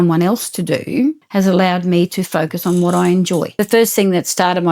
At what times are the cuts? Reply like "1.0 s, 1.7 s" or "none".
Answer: 1.2 s, 3.5 s